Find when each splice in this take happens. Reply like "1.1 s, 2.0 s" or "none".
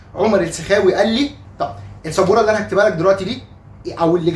1.4 s